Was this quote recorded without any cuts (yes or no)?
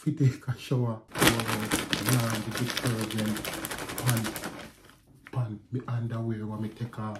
no